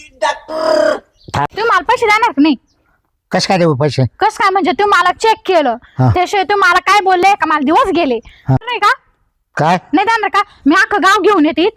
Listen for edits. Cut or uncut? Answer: cut